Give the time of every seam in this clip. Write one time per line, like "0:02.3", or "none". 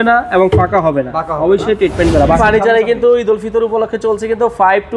0:02.4